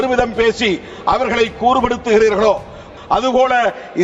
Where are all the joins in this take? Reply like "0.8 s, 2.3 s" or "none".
2.9 s